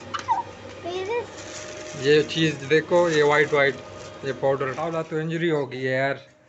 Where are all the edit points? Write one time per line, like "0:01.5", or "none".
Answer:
0:04.8